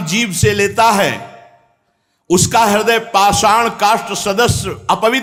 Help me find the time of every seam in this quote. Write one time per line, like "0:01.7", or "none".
none